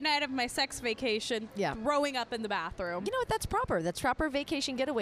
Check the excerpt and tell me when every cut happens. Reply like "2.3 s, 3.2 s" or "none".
none